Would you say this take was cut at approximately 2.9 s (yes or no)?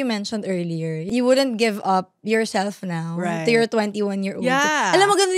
no